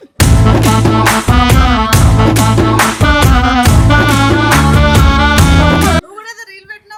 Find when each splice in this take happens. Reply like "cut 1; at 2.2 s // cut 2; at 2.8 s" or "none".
none

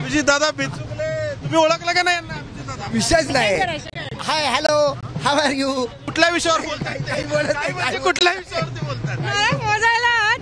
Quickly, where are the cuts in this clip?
cut 1; at 6.1 s

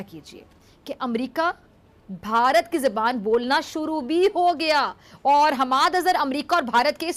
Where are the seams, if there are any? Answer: none

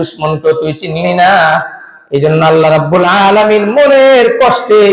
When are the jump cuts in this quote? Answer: none

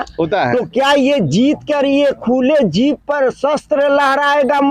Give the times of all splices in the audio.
none

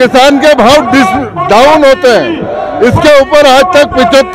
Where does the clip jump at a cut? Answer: none

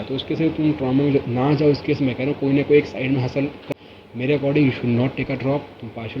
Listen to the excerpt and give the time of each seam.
cut 1; at 3.7 s

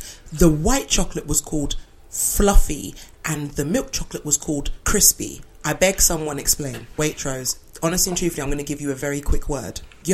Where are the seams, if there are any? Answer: cut 1; at 4.8 s // cut 2; at 6.9 s

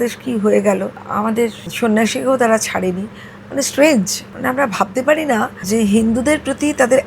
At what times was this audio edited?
cut 1; at 1.5 s // cut 2; at 4.2 s // cut 3; at 5.6 s

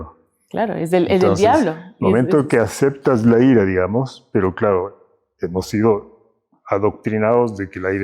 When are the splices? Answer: none

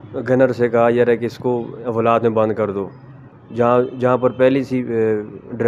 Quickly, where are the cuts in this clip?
cut 1; at 3.4 s

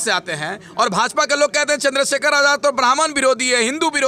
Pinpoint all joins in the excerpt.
none

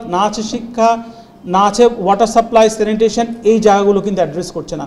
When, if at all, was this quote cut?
none

